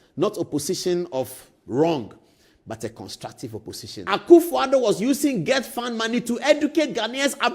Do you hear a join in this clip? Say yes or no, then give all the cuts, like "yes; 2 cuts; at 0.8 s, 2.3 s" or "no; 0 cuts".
yes; 1 cut; at 3.9 s